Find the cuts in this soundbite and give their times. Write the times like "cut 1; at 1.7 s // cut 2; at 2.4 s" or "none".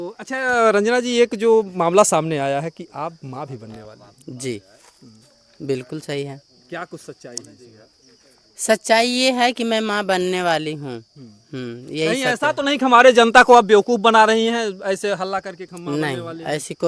none